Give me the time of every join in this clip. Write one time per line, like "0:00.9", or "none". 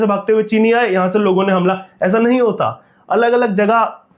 none